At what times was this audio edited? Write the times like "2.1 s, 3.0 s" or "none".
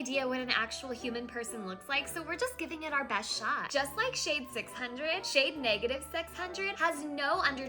6.7 s